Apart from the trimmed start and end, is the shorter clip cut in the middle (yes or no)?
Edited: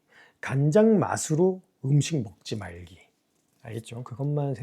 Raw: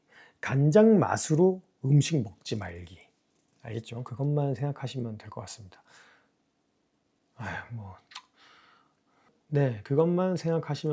no